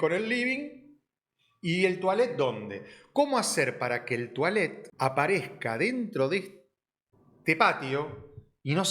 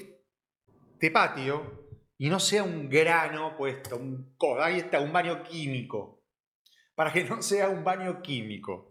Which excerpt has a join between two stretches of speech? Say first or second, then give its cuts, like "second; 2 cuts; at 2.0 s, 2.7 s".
first; 1 cut; at 4.8 s